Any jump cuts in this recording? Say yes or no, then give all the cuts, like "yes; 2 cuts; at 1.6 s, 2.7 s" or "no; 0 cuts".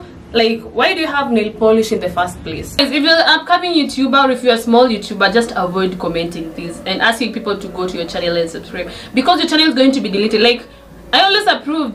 yes; 1 cut; at 2.8 s